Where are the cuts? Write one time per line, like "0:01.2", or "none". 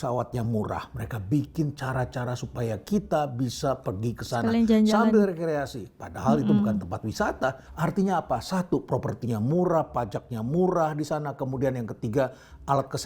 0:07.7